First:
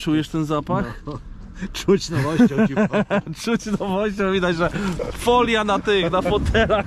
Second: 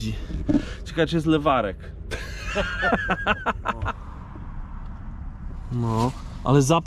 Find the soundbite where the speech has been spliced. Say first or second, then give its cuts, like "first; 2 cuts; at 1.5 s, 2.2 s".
second; 1 cut; at 4.0 s